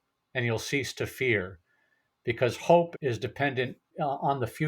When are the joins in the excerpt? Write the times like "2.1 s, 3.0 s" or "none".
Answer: 2.9 s, 3.9 s